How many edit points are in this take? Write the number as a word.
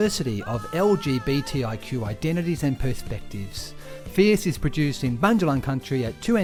zero